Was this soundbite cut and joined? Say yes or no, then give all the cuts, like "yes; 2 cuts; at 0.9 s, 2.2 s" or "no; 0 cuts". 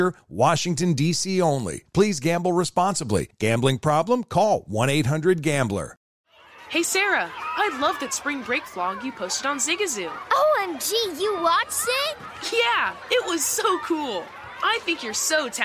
yes; 1 cut; at 6.1 s